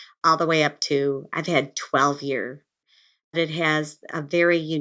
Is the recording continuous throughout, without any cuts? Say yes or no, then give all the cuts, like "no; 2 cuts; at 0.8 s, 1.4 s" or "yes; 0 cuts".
no; 1 cut; at 2.7 s